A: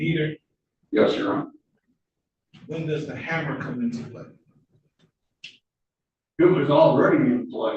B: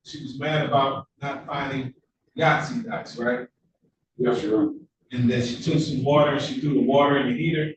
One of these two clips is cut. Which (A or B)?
A